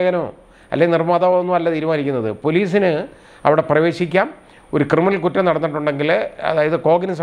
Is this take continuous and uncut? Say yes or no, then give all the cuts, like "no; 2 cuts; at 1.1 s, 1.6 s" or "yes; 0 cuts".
yes; 0 cuts